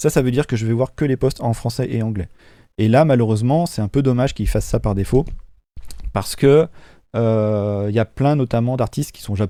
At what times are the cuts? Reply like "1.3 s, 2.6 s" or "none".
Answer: none